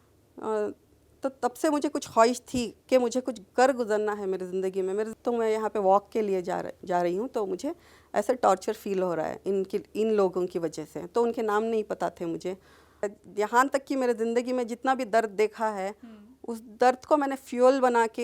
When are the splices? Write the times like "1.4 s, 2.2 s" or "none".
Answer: 5.1 s, 13.1 s